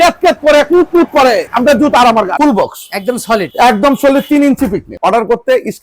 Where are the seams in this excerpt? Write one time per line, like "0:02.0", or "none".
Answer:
0:01.5
0:02.3
0:03.5
0:04.9